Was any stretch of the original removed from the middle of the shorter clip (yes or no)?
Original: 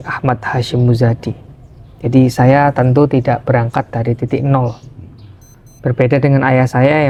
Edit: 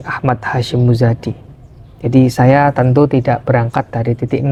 no